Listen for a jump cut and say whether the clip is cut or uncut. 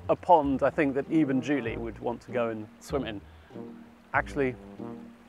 uncut